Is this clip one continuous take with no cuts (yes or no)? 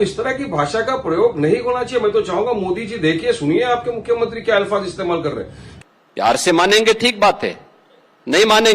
no